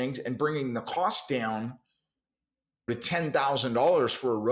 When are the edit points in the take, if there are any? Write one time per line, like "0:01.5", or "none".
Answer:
0:02.9